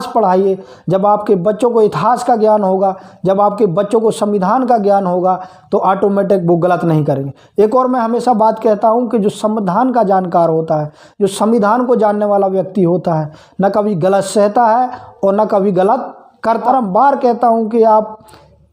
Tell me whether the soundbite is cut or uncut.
cut